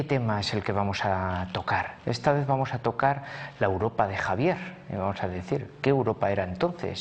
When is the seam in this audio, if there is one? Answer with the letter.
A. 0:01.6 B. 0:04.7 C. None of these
A